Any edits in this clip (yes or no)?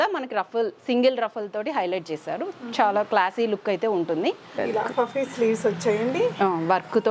yes